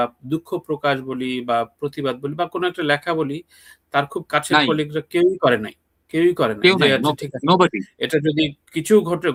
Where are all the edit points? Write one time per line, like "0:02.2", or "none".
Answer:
none